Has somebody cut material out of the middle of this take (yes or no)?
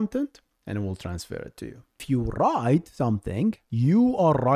yes